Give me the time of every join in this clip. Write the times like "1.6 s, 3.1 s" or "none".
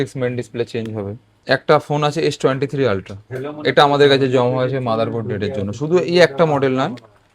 1.3 s

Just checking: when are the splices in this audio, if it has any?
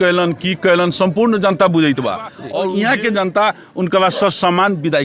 2.4 s

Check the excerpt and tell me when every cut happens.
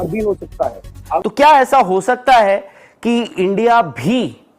1.2 s

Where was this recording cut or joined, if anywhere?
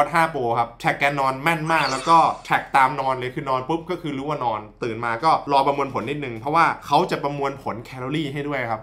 none

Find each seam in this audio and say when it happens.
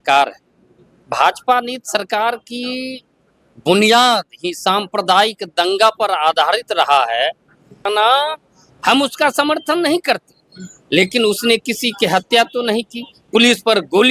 7.9 s

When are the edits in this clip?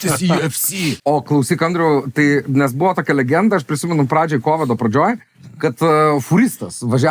1.0 s

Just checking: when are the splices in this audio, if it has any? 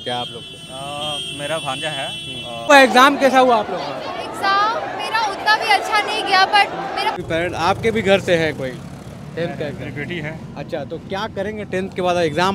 2.7 s, 7.2 s

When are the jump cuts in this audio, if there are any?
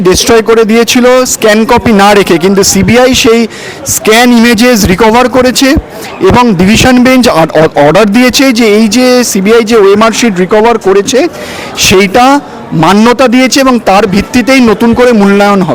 none

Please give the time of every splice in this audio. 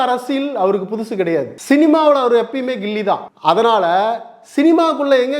1.5 s, 3.3 s

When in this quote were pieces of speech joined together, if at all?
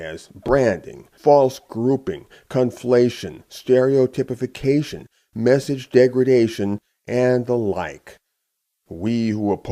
7.0 s

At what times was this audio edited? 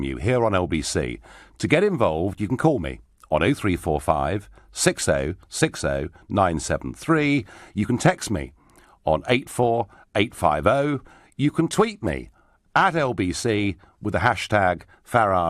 2.0 s

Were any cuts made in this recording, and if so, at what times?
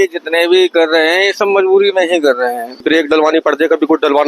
2.8 s

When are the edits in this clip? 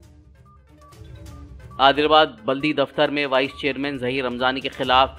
1.2 s

